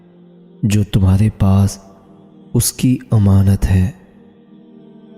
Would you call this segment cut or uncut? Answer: cut